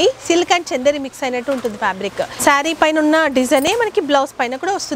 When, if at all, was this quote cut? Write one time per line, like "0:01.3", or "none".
0:02.3